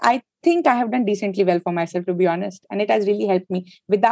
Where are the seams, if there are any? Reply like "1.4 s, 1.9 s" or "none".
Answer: none